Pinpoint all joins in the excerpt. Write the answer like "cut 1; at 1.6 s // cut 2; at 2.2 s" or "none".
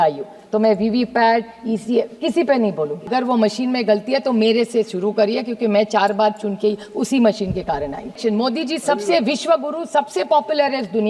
cut 1; at 3.1 s // cut 2; at 8.2 s